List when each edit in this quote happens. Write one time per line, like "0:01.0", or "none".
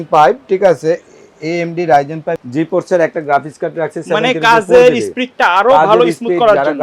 0:02.4